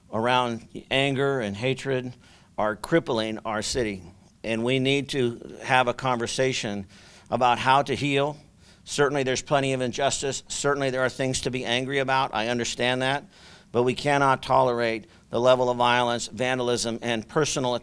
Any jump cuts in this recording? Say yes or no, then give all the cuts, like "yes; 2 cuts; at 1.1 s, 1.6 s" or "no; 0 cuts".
no; 0 cuts